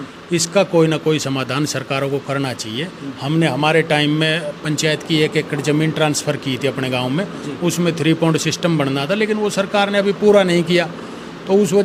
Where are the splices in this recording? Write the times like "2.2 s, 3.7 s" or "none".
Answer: none